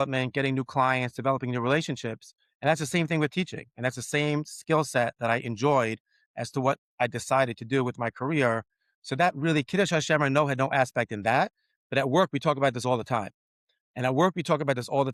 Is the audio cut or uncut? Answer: uncut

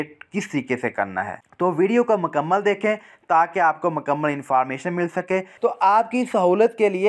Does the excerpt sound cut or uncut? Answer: uncut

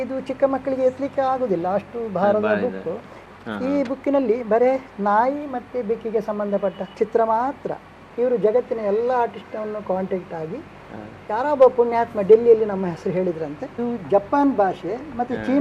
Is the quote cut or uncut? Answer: cut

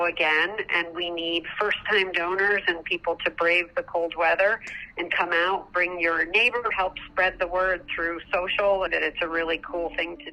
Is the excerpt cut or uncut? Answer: cut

